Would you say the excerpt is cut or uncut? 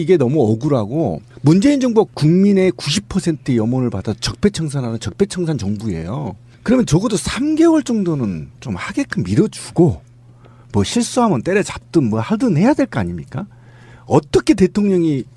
uncut